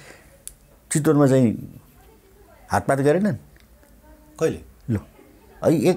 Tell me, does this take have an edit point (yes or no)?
no